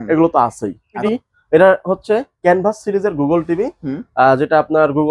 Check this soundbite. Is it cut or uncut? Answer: cut